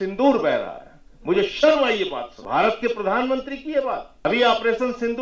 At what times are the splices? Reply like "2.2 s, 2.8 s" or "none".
2.3 s, 4.1 s